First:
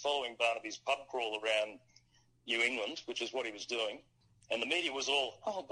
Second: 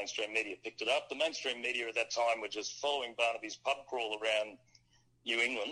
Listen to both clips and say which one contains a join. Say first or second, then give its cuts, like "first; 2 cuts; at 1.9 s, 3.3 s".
first; 1 cut; at 4.1 s